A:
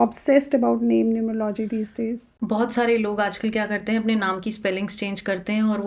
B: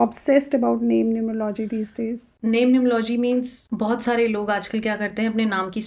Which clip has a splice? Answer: A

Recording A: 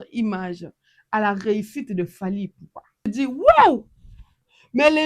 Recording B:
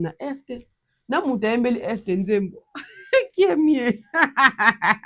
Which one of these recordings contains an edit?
A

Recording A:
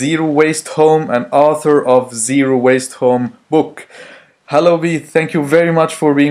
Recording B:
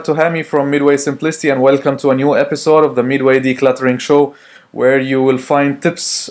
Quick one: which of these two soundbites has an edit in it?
A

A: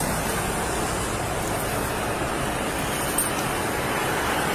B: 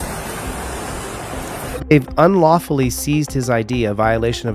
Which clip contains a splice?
B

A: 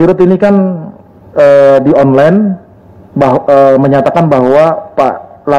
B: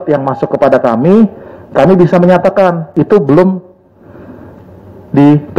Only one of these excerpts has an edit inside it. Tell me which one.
B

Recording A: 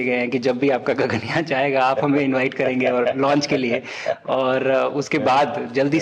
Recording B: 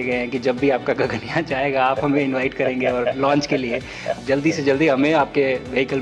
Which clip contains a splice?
B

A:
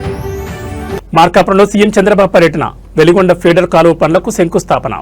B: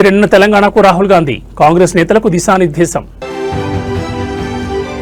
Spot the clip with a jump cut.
A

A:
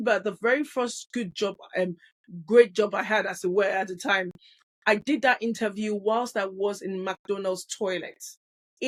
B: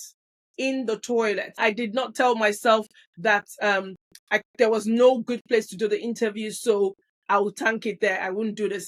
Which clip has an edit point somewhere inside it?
B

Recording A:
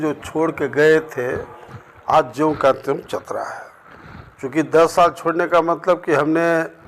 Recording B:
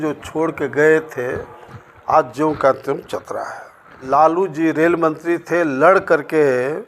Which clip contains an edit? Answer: B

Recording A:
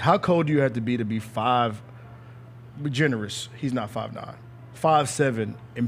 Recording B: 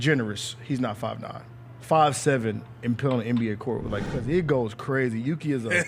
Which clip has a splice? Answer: B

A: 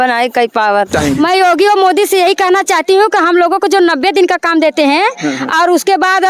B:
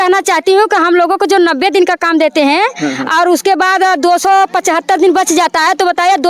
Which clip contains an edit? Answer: A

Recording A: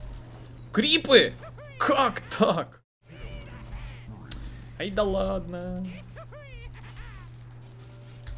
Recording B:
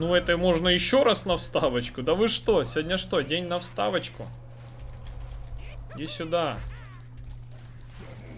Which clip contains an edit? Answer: A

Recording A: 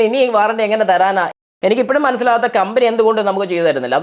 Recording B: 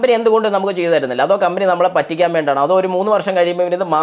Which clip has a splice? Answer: A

